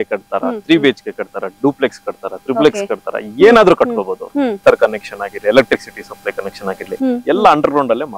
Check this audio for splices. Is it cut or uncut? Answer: cut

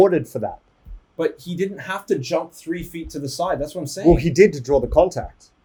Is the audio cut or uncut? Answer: uncut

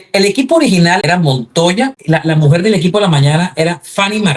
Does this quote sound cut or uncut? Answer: cut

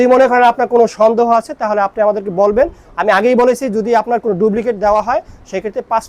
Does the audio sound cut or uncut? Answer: uncut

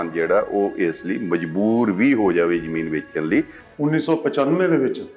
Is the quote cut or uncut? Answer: cut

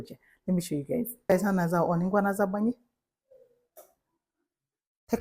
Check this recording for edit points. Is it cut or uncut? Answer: uncut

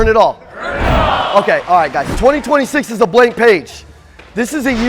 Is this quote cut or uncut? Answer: cut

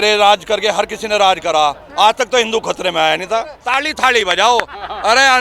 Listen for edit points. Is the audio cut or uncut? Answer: cut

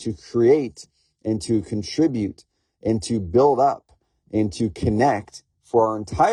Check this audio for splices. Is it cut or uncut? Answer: uncut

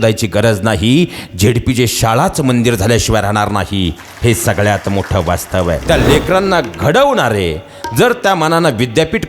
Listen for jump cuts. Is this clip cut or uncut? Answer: cut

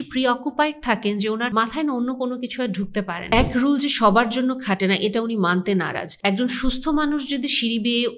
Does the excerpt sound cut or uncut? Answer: cut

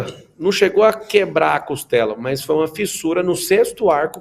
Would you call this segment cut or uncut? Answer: uncut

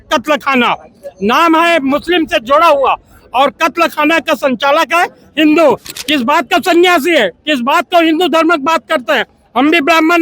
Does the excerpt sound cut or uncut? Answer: cut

